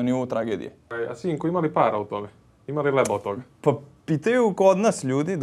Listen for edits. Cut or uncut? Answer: cut